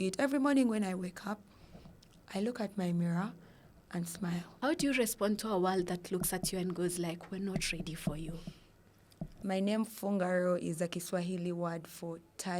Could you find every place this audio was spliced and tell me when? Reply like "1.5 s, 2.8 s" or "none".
4.5 s, 9.4 s